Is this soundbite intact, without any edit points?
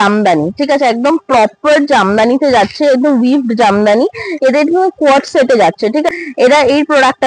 no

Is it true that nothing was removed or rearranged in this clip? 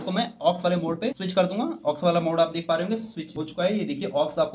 yes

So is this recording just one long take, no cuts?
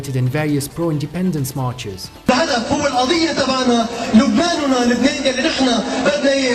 no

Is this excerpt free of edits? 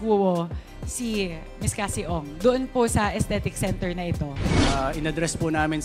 no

